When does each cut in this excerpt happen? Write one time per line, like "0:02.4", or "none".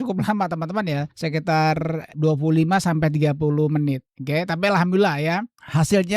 0:01.1
0:02.1